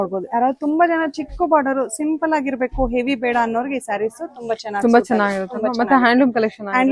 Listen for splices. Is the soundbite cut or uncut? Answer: uncut